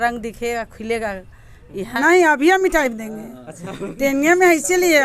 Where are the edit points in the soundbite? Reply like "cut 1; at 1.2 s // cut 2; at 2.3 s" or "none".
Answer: cut 1; at 1.9 s